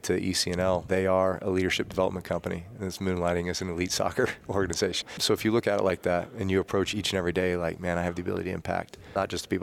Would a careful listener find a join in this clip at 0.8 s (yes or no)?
yes